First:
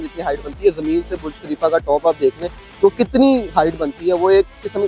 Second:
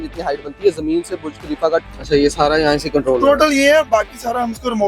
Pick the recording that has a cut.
second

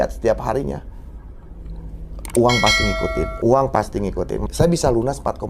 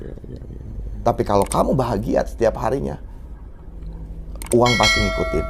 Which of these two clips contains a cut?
first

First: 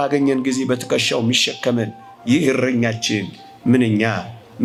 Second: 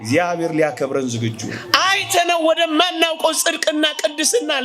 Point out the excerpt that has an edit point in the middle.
second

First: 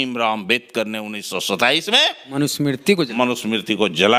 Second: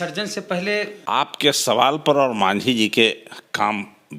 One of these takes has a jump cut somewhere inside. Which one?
second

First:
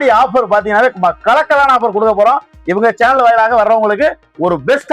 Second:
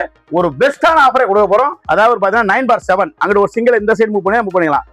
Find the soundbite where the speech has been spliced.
second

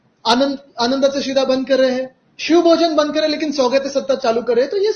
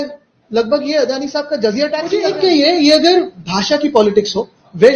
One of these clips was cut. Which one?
second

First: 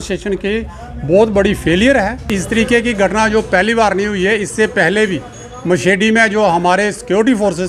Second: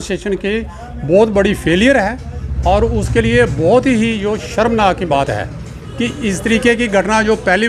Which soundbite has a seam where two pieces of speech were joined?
first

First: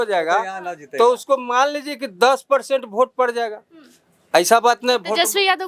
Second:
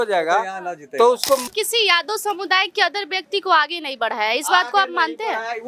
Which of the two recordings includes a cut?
second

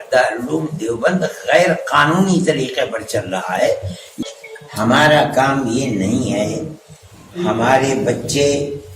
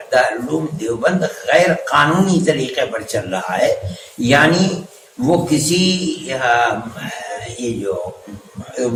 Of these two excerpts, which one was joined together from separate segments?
first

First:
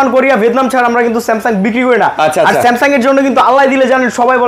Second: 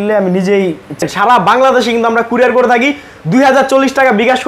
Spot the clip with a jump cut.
second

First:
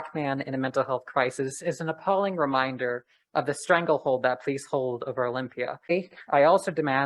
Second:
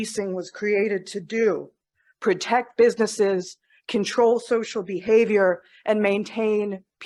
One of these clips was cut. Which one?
first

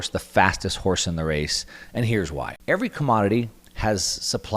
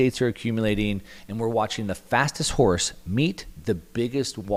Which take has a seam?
first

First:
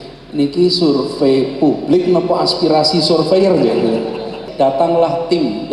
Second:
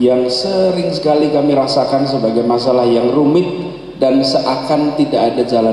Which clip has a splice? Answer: first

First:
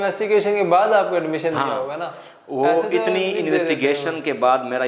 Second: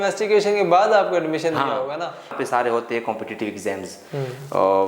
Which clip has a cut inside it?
second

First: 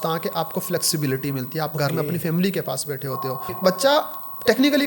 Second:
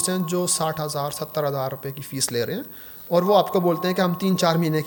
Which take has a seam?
first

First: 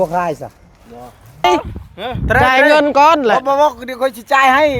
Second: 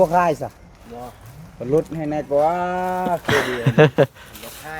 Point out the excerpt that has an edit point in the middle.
first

